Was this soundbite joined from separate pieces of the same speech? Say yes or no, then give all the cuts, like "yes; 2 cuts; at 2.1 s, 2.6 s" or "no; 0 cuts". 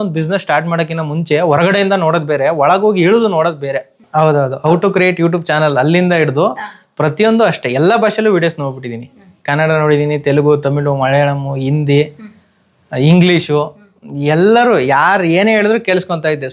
yes; 1 cut; at 4.0 s